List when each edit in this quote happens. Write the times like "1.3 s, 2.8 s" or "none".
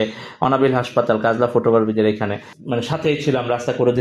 2.5 s